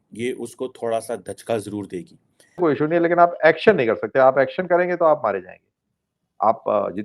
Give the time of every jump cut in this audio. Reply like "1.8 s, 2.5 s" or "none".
2.6 s